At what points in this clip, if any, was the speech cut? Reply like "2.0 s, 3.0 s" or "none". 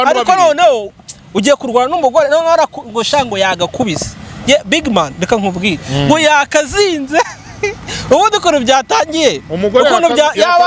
0.9 s